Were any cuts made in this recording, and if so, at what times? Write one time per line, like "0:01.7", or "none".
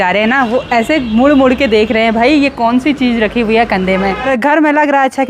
0:04.3